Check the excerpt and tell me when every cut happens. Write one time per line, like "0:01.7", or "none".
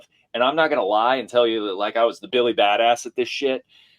0:02.2